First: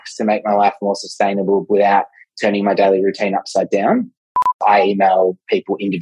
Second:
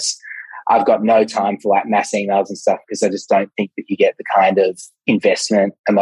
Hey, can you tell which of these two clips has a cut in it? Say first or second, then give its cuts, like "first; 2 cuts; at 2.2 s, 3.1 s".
first; 1 cut; at 4.6 s